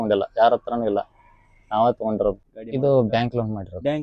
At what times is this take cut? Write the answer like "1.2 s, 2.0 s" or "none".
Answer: 2.5 s